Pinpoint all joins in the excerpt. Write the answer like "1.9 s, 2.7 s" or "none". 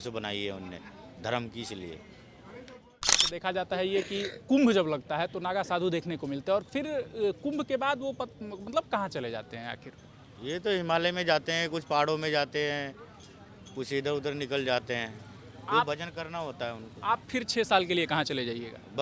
3.3 s